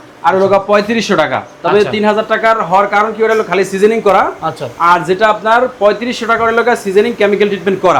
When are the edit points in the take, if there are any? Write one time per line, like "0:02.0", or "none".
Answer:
none